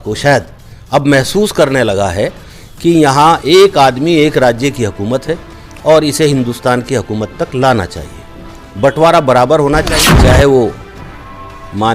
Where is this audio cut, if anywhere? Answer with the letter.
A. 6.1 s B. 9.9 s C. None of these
B